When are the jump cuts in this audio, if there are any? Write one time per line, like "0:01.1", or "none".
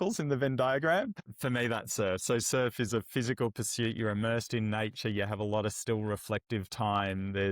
0:01.2